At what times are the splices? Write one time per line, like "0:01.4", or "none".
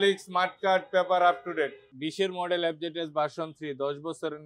0:01.9

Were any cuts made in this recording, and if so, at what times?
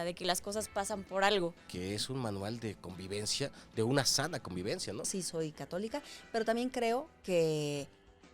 0:01.7
0:05.1

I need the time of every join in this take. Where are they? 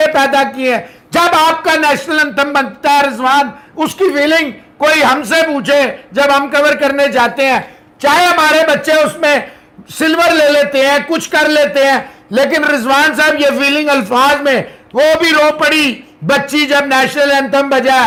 none

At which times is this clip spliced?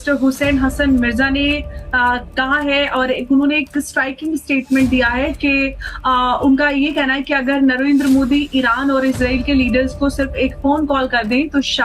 0:03.6

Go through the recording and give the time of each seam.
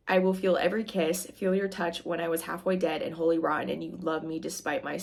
none

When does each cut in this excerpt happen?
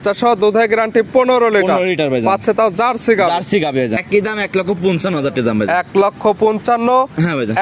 0:04.0

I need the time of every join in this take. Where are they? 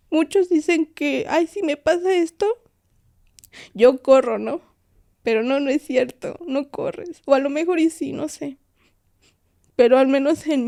none

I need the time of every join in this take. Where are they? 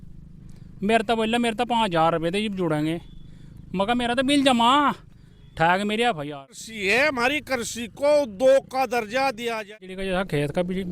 0:06.6
0:09.7

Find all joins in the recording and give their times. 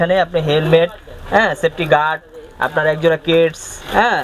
none

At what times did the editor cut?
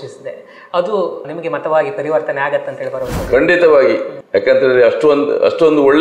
0:04.1

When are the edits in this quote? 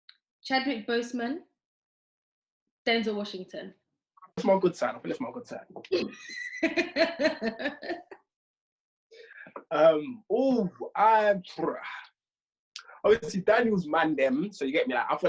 0:04.4

